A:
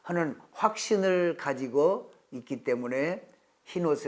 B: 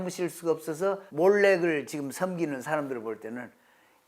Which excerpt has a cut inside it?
B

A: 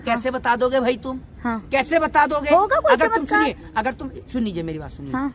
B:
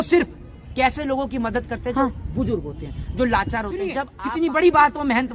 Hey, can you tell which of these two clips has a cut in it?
B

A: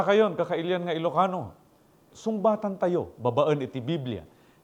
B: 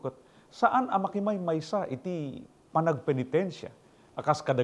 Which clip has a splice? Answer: A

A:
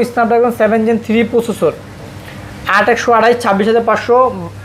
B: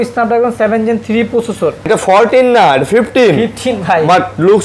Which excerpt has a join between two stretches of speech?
B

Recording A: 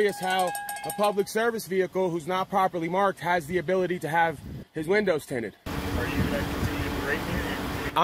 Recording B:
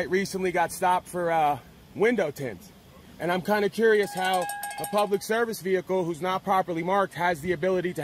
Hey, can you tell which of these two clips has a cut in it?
A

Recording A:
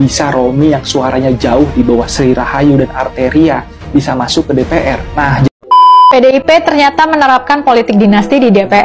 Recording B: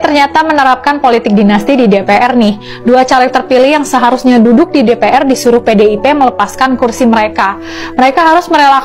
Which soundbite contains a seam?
A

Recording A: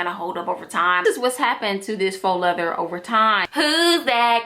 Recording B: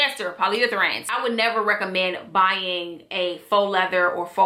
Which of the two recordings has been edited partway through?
A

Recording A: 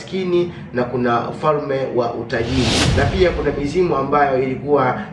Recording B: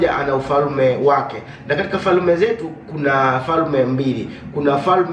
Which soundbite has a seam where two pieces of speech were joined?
A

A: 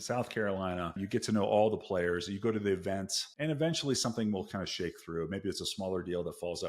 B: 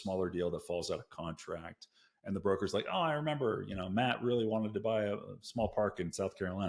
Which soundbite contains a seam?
A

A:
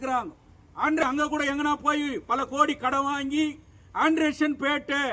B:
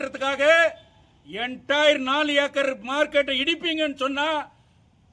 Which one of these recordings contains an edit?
A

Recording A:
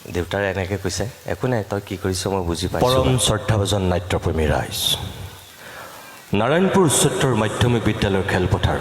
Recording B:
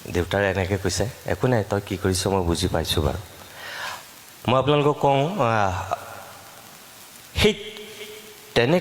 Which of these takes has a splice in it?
A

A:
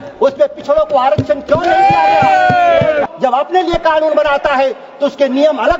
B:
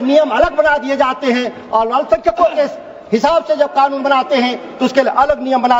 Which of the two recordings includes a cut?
A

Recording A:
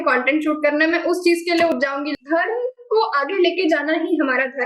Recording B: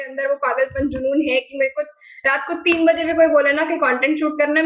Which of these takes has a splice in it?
A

